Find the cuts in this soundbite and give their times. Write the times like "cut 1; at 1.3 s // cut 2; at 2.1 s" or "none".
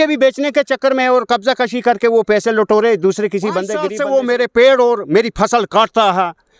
cut 1; at 3.9 s